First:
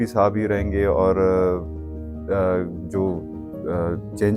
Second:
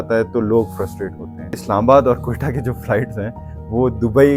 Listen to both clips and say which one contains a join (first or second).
second